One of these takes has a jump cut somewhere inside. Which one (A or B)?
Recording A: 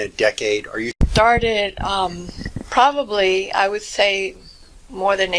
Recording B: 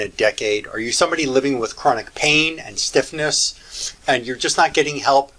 A